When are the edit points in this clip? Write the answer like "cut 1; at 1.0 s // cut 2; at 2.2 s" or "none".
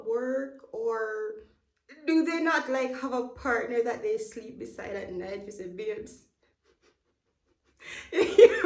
none